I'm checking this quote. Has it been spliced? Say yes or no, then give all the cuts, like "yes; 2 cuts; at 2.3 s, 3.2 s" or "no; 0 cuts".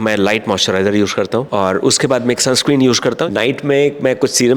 yes; 2 cuts; at 1.5 s, 3.2 s